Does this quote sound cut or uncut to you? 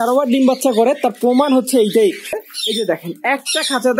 cut